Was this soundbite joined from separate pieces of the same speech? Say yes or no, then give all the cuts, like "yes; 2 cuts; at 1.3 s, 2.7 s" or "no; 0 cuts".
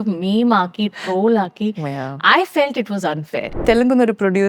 yes; 1 cut; at 3.5 s